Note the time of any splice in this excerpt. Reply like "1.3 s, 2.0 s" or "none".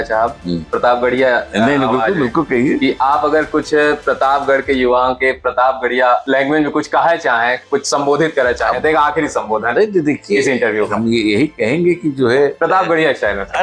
none